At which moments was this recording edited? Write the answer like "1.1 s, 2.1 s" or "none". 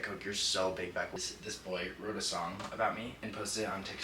1.1 s, 3.2 s